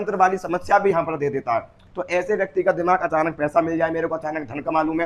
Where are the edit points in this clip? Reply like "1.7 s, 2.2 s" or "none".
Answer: 1.8 s